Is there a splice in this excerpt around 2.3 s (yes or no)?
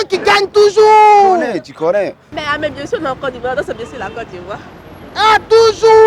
yes